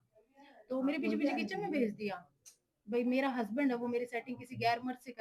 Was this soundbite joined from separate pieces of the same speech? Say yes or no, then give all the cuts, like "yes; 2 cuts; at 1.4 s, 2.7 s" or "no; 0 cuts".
no; 0 cuts